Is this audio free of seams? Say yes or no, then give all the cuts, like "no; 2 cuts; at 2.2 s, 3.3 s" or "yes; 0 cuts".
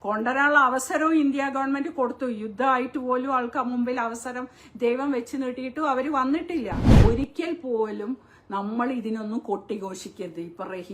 no; 1 cut; at 6.9 s